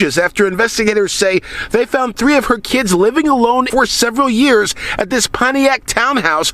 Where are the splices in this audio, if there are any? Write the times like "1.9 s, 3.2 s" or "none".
3.7 s